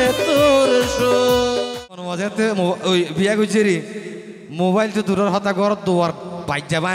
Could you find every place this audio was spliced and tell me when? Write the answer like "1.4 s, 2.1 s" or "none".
2.1 s